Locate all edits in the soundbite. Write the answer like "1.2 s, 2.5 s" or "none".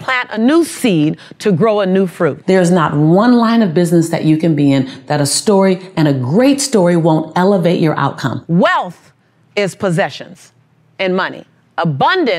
2.4 s, 8.3 s